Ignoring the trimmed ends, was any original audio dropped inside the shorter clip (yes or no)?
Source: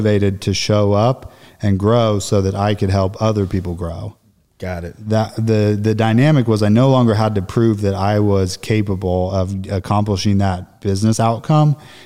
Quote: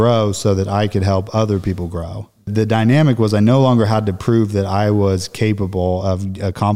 yes